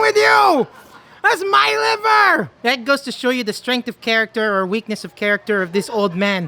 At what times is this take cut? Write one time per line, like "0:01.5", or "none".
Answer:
0:02.5